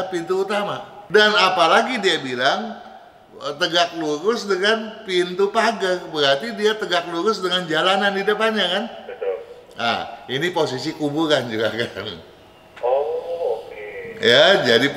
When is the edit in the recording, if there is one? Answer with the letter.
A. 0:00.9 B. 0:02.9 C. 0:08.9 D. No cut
A